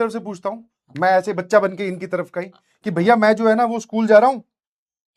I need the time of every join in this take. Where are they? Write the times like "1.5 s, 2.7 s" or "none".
none